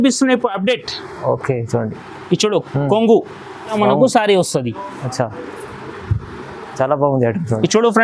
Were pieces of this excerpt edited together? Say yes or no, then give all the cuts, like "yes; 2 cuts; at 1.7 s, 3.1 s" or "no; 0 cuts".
yes; 1 cut; at 3.8 s